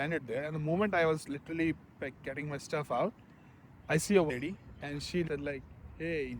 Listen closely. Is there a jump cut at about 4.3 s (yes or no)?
yes